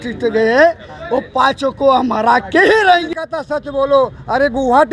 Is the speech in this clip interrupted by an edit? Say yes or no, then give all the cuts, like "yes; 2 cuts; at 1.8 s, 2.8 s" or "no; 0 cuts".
yes; 1 cut; at 3.1 s